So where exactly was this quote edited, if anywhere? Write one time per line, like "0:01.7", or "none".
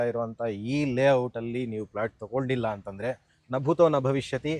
none